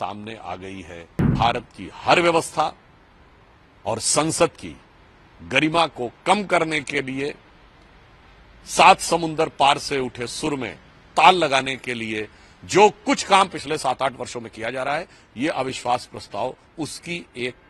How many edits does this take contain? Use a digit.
1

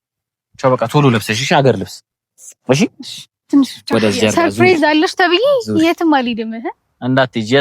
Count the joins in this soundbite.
1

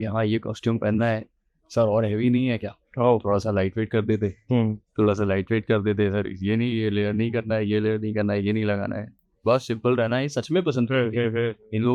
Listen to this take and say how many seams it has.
0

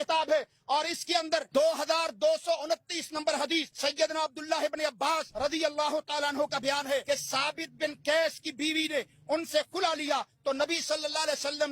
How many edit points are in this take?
4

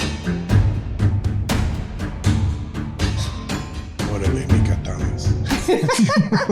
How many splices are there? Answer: 1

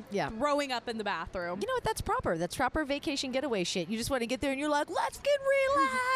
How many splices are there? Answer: 1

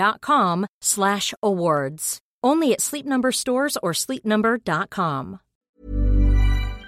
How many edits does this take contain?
1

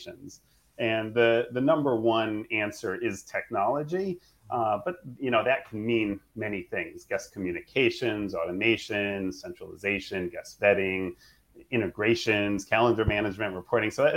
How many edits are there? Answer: 0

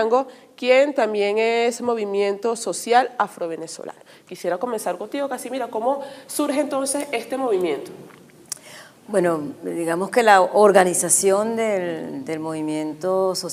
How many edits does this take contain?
1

